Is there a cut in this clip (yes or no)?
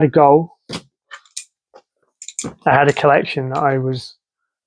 no